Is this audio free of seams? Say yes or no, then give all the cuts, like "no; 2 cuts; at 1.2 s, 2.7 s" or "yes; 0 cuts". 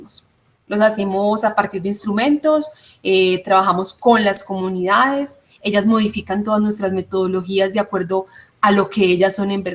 no; 1 cut; at 6.5 s